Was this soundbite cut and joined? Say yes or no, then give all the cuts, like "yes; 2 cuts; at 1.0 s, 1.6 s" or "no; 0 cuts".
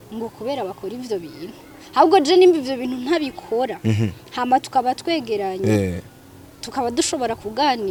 no; 0 cuts